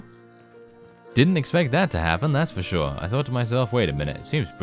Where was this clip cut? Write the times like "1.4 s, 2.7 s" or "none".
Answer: none